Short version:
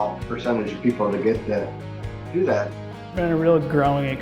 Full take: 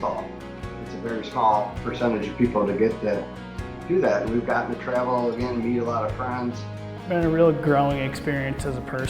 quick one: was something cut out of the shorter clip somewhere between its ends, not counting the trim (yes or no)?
yes